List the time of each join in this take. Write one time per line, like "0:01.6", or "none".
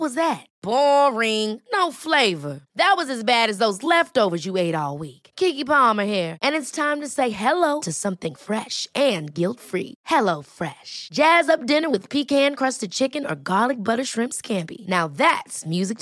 none